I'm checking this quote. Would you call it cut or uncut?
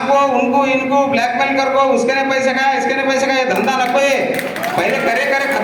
uncut